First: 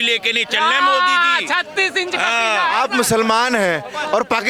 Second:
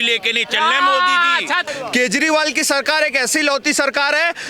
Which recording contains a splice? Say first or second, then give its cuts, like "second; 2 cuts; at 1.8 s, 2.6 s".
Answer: second; 1 cut; at 1.7 s